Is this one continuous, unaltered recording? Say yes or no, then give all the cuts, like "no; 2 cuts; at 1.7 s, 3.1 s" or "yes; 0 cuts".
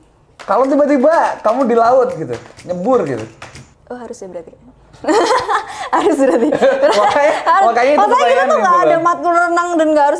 yes; 0 cuts